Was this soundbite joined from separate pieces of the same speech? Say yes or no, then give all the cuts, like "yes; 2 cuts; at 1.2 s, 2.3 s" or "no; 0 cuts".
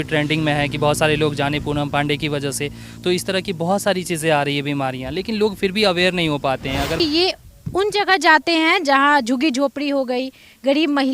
yes; 1 cut; at 7.0 s